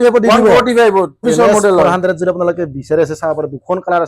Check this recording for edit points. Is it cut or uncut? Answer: cut